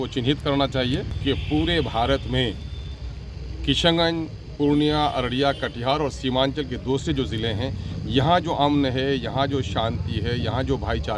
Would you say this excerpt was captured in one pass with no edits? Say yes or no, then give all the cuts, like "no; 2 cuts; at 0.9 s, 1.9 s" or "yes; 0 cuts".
no; 1 cut; at 1.1 s